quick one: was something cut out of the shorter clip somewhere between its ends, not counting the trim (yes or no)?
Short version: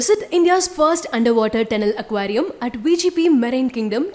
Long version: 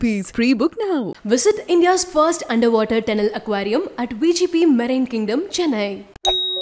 no